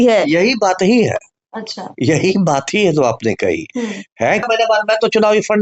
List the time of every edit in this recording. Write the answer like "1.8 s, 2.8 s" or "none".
4.5 s

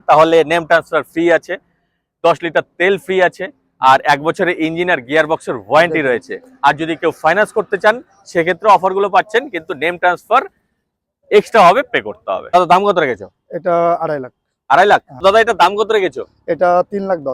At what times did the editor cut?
12.5 s, 15.2 s

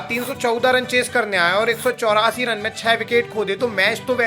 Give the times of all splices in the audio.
none

